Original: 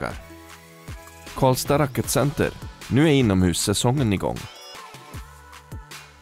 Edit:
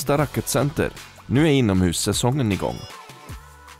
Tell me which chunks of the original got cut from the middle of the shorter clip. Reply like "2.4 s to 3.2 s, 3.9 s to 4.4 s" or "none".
4.4 s to 4.7 s